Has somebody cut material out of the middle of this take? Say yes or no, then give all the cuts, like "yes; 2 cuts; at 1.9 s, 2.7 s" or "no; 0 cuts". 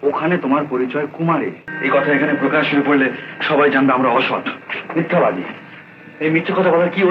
yes; 1 cut; at 1.7 s